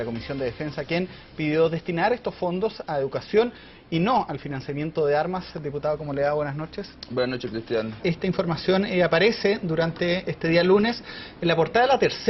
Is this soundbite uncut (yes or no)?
no